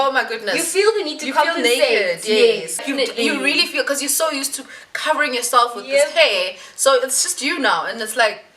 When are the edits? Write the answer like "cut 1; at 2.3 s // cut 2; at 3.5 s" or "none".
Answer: cut 1; at 2.8 s